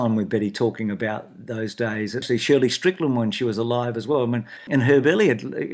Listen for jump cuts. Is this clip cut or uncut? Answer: cut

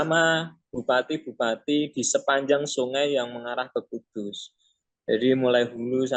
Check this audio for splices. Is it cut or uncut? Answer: uncut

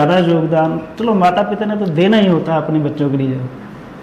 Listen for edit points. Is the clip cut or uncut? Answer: uncut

